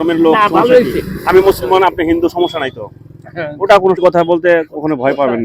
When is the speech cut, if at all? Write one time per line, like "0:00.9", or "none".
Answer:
0:04.0